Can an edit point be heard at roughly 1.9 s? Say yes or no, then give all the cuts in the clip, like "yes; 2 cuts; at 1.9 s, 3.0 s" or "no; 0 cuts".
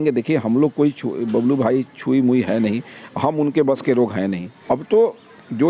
no; 1 cut; at 4.5 s